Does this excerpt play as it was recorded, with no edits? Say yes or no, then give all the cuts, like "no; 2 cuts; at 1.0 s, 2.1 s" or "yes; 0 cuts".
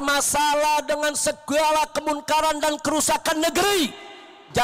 yes; 0 cuts